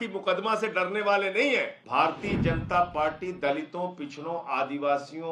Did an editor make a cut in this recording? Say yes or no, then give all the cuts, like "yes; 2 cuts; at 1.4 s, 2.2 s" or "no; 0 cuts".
yes; 1 cut; at 1.8 s